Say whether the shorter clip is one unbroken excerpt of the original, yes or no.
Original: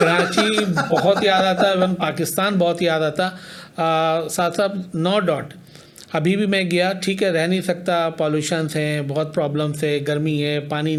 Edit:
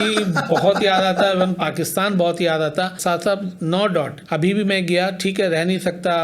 no